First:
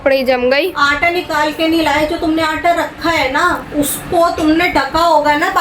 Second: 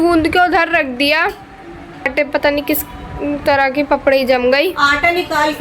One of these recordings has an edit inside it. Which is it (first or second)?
second